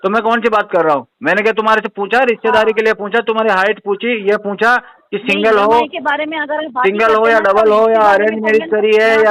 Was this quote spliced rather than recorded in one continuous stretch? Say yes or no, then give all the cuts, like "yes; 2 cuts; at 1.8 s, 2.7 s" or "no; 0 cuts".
no; 0 cuts